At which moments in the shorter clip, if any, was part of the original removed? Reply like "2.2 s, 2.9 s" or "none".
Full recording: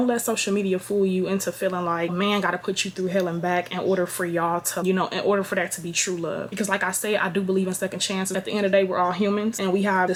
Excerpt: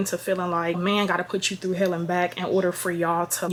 none